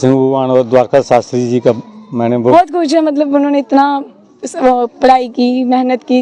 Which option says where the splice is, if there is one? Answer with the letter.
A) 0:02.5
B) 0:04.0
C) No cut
A